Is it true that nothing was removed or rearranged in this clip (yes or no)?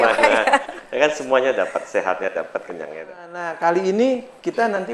no